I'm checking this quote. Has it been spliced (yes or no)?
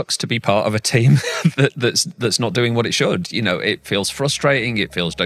no